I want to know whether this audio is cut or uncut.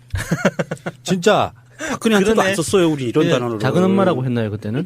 cut